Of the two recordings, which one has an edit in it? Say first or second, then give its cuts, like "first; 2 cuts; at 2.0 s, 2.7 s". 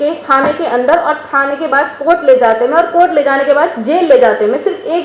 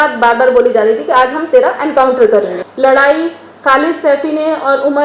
second; 1 cut; at 2.6 s